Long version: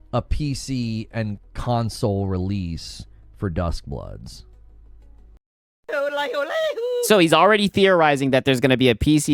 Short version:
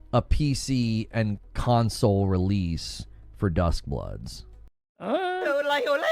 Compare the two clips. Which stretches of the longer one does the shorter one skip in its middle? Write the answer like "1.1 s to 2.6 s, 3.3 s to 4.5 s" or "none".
5.2 s to 5.7 s